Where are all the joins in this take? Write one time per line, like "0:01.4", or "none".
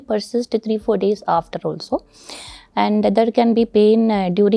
none